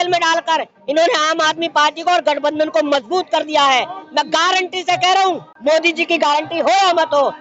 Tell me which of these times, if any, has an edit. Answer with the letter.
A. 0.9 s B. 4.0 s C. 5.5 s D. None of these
C